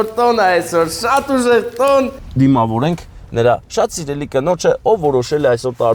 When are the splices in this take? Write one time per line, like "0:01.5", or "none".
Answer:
0:02.2